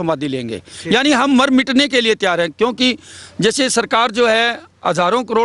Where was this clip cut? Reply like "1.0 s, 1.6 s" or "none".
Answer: none